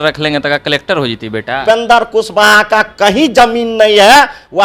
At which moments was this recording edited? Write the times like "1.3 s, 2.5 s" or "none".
1.6 s